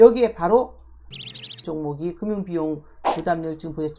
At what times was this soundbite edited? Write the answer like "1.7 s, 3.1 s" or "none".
1.1 s